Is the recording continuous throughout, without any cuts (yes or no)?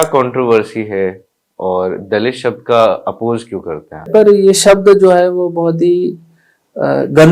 no